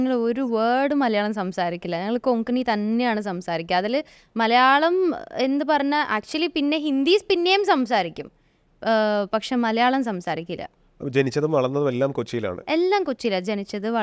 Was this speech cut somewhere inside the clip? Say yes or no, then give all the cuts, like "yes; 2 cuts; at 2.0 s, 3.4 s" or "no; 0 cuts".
no; 0 cuts